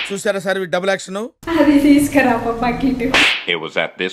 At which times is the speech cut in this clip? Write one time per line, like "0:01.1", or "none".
0:01.4
0:03.0